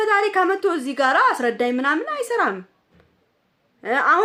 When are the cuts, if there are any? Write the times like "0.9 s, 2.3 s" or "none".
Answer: none